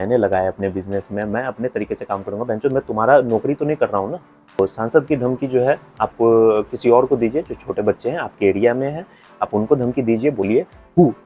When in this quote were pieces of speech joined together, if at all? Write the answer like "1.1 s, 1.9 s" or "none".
4.6 s